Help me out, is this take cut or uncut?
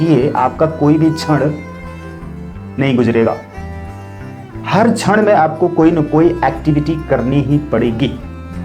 uncut